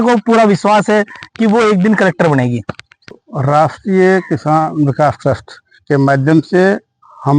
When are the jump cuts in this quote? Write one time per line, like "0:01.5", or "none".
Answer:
0:03.2

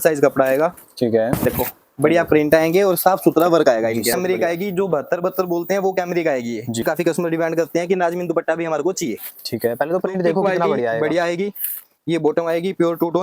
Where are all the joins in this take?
0:04.1
0:06.8

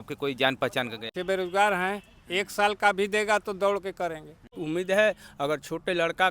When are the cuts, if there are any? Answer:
0:01.1
0:04.5

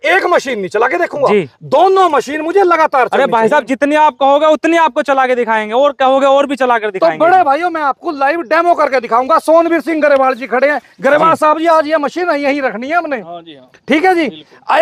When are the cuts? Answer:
none

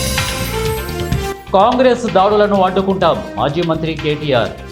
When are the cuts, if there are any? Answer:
0:01.2

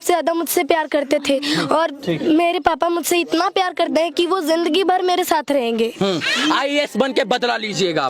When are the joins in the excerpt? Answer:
none

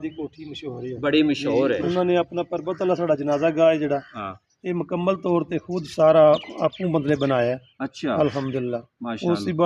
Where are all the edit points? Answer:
0:01.8

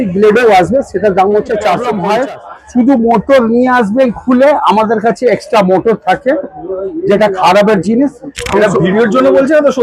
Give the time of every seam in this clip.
0:01.9

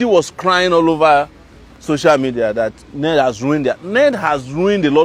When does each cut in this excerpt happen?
none

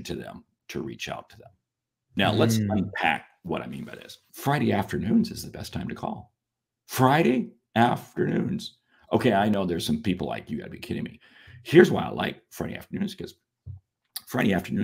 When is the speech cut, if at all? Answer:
0:04.2

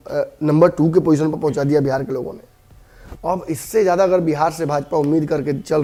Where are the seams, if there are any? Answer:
none

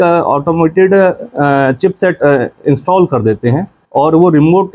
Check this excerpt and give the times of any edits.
0:03.7

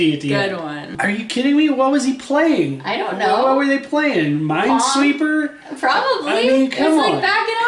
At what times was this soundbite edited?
0:00.9

